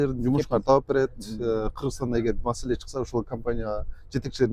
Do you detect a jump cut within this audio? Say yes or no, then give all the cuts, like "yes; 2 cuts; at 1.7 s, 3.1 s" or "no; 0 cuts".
no; 0 cuts